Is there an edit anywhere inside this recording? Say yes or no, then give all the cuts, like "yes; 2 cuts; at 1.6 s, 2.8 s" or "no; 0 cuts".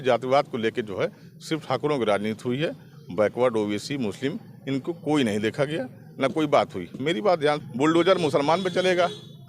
yes; 1 cut; at 7.6 s